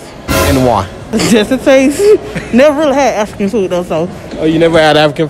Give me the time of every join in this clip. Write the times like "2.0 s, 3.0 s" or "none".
1.0 s, 4.2 s